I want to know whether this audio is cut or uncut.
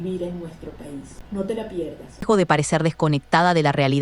cut